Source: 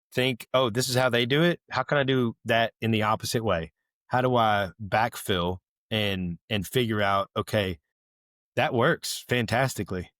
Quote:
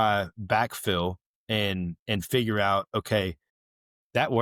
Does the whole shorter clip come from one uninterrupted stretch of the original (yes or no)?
yes